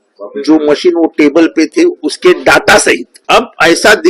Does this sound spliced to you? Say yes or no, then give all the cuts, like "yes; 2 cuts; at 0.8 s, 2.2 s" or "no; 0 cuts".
yes; 1 cut; at 3.1 s